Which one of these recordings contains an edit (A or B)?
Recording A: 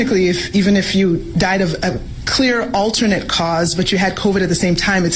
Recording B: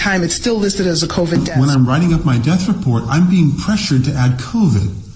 B